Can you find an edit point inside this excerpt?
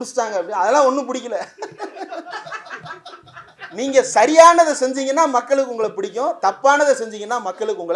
no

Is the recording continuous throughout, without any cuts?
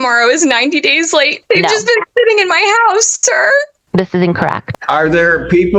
no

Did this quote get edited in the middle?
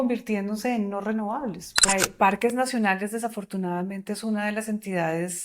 yes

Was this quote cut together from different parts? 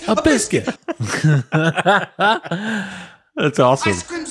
no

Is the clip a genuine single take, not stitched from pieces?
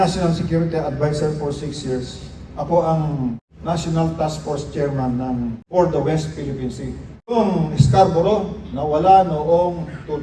no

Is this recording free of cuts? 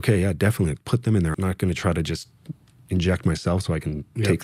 no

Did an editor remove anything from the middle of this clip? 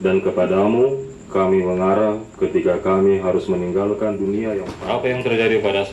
yes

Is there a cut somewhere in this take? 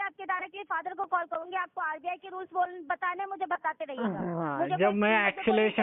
no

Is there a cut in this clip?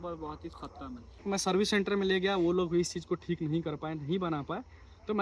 yes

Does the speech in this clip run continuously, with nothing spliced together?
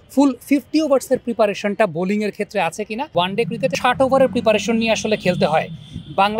no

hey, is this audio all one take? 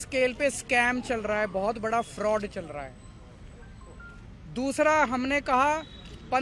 yes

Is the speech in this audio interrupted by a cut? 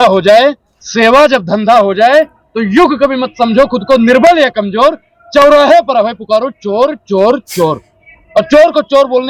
no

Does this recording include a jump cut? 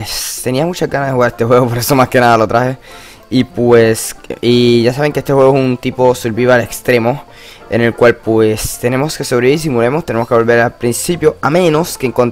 no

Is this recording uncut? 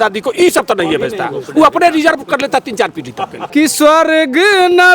no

